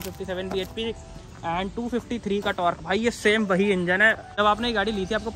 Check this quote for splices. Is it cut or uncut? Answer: cut